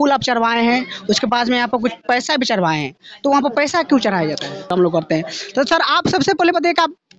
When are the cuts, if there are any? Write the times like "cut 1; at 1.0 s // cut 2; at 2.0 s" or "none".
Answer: cut 1; at 4.7 s